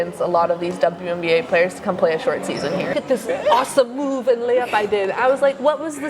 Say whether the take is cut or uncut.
cut